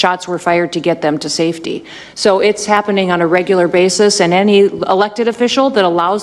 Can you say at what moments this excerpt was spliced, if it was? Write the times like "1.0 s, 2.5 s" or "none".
none